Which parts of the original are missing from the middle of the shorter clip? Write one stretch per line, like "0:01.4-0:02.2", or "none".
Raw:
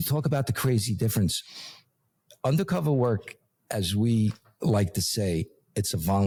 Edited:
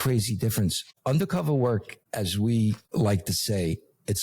0:01.5-0:02.3
0:03.4-0:03.5
0:04.4-0:04.5